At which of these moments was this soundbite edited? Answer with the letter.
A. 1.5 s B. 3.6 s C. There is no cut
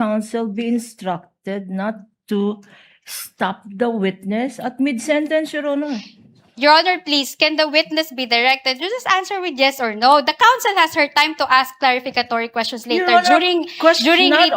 C